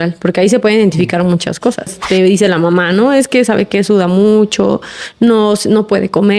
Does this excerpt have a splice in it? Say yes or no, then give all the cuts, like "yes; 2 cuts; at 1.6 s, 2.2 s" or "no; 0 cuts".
yes; 1 cut; at 2.0 s